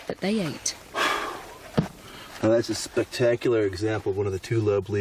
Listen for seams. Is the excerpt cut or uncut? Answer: uncut